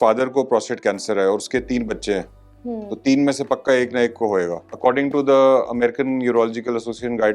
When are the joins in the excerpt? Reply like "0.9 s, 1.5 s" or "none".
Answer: 4.6 s